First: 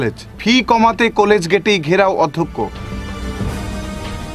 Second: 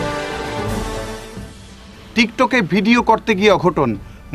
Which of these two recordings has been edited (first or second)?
second